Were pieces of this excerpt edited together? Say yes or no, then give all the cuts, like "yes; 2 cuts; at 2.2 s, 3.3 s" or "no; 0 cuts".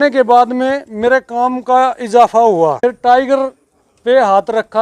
yes; 1 cut; at 2.8 s